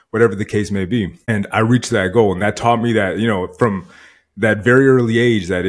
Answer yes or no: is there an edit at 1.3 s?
yes